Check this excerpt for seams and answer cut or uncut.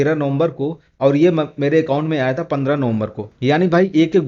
cut